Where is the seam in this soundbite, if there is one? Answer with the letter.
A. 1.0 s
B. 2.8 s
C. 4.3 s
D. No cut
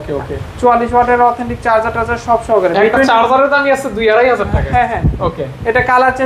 D